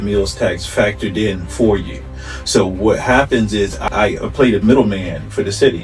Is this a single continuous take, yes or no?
no